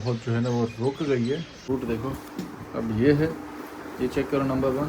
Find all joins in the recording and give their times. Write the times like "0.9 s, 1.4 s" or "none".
1.6 s